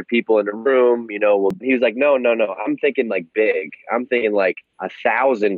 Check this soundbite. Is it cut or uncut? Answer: cut